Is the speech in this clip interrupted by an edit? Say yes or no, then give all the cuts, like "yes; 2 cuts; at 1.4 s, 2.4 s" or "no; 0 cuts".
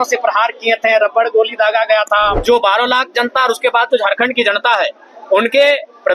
yes; 1 cut; at 2.4 s